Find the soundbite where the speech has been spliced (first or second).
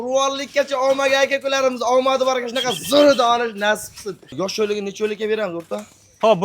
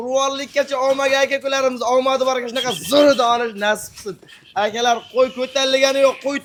first